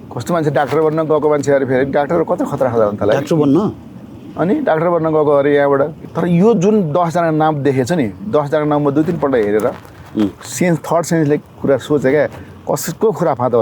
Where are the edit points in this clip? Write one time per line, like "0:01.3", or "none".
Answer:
0:05.9